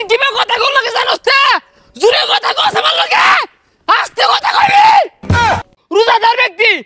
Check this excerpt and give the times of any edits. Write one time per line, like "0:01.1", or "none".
0:05.5